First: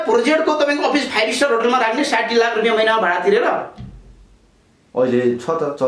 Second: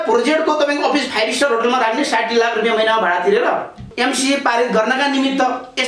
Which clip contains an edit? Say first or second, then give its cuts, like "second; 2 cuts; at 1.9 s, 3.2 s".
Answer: second; 1 cut; at 3.9 s